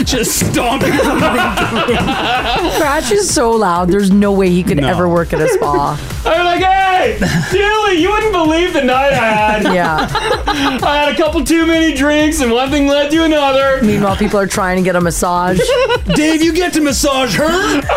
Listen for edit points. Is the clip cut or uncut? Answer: uncut